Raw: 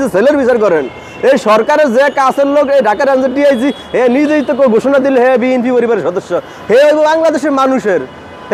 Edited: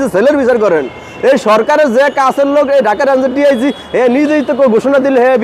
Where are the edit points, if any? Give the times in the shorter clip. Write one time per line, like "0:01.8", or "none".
none